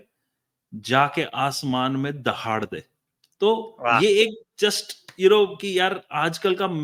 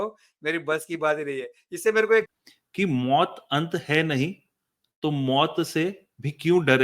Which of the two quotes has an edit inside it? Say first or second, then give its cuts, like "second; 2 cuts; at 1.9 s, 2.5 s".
second; 1 cut; at 2.4 s